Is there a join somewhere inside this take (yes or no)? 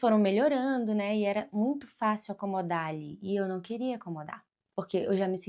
no